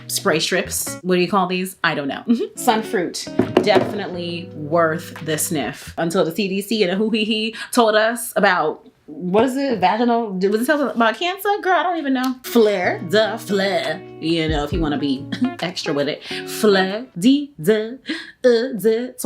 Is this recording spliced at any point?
yes; 4 cuts; at 2.5 s, 5.9 s, 12.4 s, 17.0 s

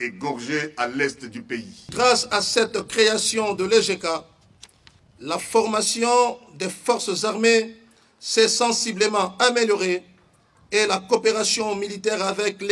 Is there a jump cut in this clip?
yes; 1 cut; at 1.9 s

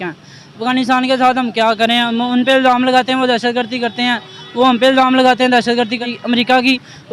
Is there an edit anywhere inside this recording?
yes; 1 cut; at 6.1 s

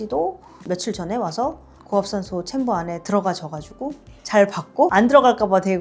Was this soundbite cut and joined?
no; 0 cuts

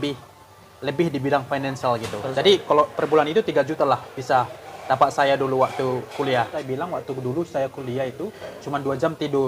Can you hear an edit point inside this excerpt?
yes; 2 cuts; at 2.1 s, 6.6 s

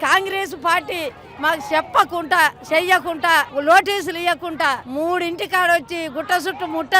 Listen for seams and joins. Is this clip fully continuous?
no; 2 cuts; at 3.5 s, 4.8 s

